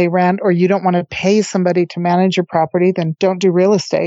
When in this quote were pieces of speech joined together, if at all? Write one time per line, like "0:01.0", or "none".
0:03.1